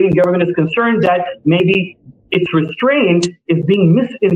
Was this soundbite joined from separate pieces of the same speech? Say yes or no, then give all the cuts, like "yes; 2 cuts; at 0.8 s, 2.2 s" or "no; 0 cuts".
no; 0 cuts